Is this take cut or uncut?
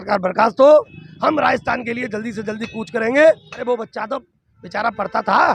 cut